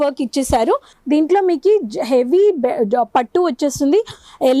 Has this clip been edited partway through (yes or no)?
yes